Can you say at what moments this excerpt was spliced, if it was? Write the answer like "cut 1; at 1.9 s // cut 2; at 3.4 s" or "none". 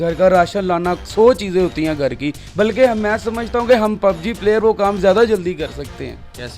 none